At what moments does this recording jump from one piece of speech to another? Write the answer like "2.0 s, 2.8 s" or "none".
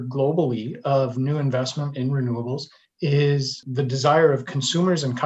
2.8 s, 3.6 s